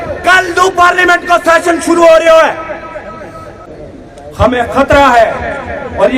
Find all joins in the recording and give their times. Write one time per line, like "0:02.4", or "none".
0:03.6